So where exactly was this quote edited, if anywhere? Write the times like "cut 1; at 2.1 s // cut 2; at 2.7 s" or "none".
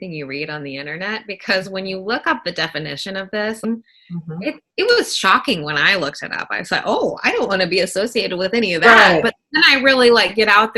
cut 1; at 3.6 s